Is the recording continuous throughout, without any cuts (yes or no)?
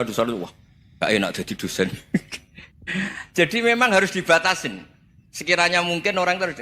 yes